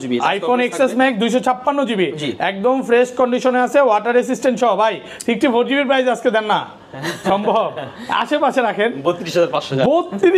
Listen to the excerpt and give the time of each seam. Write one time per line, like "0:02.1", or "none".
none